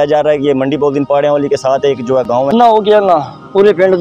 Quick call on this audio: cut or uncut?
cut